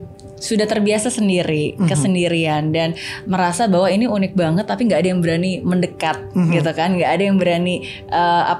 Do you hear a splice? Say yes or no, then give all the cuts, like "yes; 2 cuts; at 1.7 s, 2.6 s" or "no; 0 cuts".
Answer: no; 0 cuts